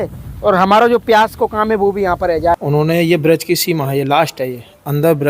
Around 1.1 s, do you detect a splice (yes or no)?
no